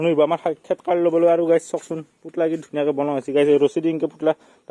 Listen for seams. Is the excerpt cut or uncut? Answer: uncut